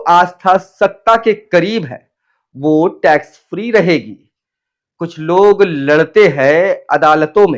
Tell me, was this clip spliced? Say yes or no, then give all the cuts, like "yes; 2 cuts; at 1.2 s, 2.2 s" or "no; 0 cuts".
no; 0 cuts